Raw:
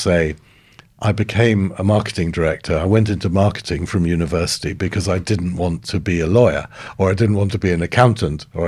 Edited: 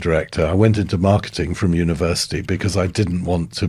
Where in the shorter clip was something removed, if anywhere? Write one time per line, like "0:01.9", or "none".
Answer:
none